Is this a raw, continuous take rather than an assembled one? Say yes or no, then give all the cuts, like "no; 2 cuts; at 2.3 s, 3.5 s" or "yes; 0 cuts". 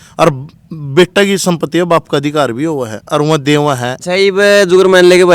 no; 1 cut; at 4.0 s